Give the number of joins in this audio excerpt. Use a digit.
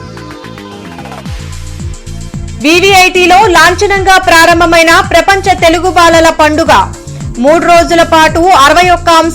1